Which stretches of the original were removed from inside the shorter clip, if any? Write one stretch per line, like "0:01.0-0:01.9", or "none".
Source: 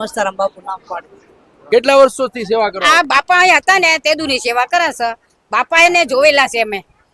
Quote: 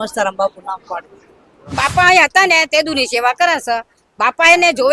0:01.7-0:03.0